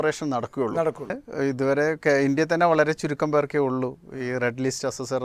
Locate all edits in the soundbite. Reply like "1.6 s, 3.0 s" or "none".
1.2 s